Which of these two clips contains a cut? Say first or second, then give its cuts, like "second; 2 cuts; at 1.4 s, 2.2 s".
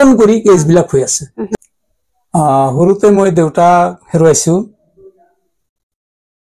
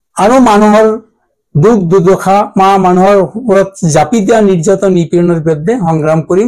first; 1 cut; at 1.5 s